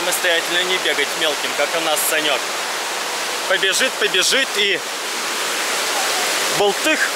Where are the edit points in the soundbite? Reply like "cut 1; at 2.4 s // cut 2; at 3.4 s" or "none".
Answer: none